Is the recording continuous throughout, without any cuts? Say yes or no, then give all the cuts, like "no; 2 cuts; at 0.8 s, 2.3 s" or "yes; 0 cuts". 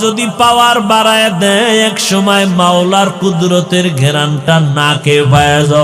yes; 0 cuts